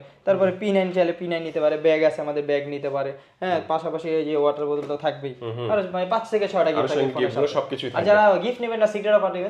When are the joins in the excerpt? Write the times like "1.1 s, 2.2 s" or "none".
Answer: none